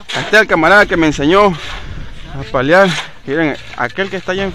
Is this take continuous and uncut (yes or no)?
no